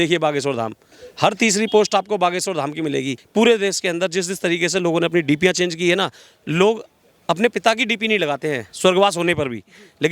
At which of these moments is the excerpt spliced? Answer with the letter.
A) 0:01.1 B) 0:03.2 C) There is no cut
B